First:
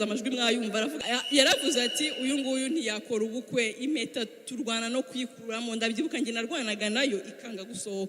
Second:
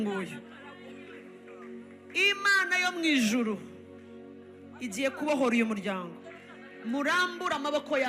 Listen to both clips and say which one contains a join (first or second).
first